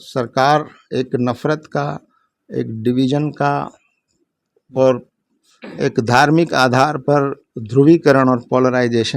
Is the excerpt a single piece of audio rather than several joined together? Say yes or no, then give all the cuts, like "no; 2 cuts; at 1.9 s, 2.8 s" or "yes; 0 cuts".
yes; 0 cuts